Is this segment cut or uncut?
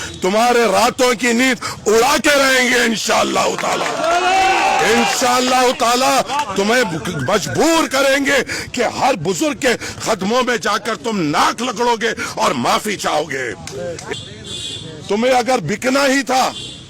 cut